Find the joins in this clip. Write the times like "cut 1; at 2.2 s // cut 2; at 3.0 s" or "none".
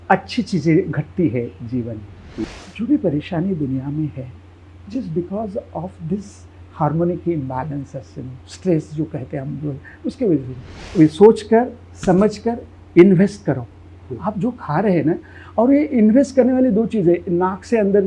cut 1; at 2.4 s // cut 2; at 10.8 s